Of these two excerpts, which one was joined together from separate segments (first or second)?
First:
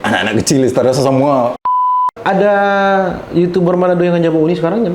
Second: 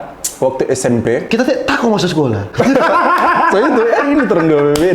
first